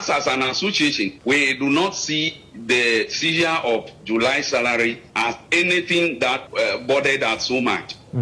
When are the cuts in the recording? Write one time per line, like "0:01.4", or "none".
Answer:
0:01.2
0:06.4